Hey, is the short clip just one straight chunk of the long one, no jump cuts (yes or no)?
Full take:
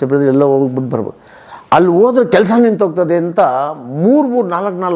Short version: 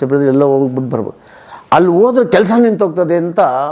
yes